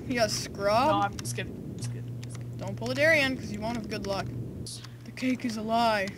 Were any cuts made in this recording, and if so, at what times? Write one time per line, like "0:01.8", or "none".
0:04.7